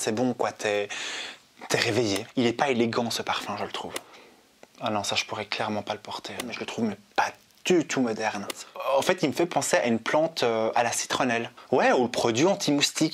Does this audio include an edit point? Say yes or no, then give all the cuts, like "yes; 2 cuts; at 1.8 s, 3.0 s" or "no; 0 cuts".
yes; 5 cuts; at 2.3 s, 4.1 s, 6.6 s, 8.7 s, 11.5 s